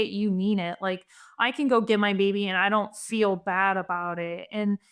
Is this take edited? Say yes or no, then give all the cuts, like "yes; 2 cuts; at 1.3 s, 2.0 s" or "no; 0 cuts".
no; 0 cuts